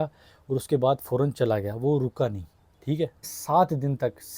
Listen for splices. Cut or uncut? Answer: cut